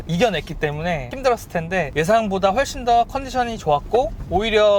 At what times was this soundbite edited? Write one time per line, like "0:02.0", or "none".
0:01.1
0:01.9